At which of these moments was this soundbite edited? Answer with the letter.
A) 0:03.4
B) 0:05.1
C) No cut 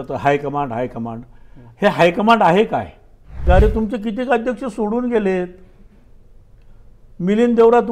A